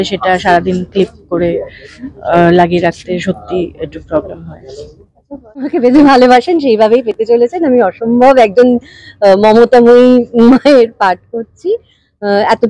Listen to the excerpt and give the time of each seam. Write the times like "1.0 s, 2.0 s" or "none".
5.4 s